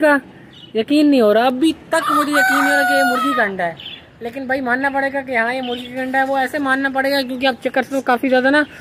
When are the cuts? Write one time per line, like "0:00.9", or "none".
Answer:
none